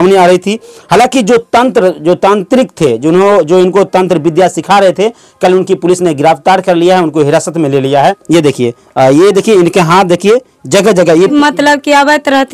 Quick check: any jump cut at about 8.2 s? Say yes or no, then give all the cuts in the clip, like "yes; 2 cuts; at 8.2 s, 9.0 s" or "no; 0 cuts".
yes; 2 cuts; at 8.2 s, 11.3 s